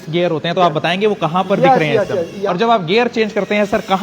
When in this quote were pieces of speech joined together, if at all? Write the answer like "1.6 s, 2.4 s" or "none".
2.4 s